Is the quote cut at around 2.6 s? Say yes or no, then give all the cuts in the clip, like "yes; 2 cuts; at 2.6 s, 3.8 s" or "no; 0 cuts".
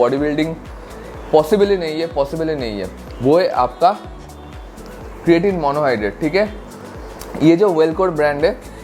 no; 0 cuts